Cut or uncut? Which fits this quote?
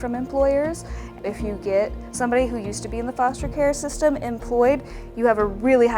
cut